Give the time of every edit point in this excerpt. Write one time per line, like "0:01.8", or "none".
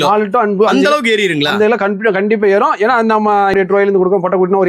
0:03.5